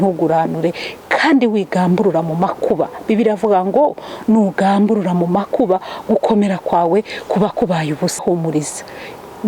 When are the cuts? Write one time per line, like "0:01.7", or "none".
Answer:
0:08.2